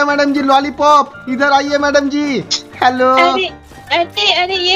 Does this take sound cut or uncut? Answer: uncut